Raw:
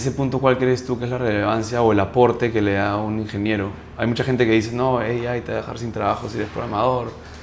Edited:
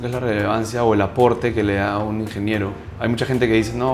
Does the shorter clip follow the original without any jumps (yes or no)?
yes